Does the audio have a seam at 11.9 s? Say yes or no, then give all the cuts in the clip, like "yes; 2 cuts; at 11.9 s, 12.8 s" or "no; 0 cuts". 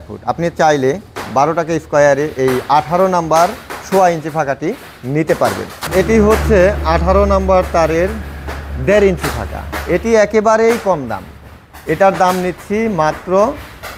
no; 1 cut; at 5.9 s